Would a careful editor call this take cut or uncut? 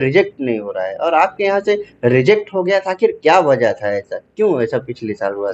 uncut